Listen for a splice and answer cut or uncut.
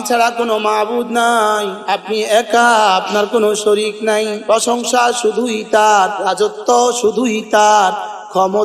cut